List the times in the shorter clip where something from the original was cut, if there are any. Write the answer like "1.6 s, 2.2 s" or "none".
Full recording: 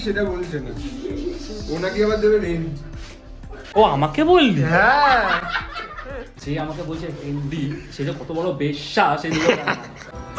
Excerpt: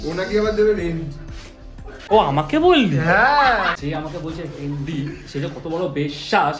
3.8 s